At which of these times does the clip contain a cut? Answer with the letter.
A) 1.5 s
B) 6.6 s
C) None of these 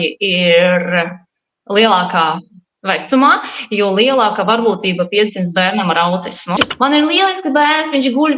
B